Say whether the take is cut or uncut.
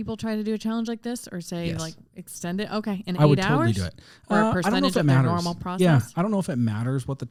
uncut